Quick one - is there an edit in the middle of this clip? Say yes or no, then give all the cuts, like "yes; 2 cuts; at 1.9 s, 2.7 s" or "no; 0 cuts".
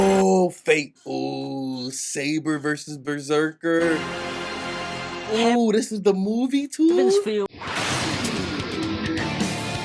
yes; 1 cut; at 7.5 s